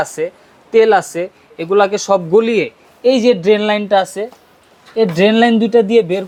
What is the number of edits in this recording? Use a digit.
0